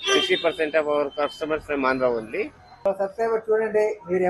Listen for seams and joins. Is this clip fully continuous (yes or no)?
no